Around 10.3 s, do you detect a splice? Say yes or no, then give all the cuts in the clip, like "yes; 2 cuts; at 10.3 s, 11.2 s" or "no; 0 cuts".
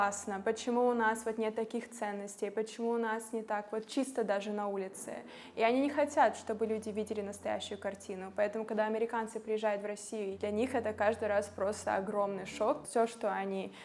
yes; 2 cuts; at 10.3 s, 12.8 s